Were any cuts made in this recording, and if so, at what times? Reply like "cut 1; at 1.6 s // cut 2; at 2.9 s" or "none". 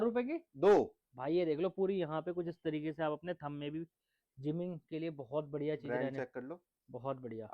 none